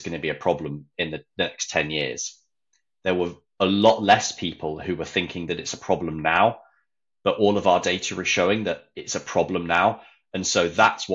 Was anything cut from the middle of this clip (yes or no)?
no